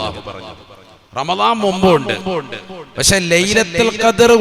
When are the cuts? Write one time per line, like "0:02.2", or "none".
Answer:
none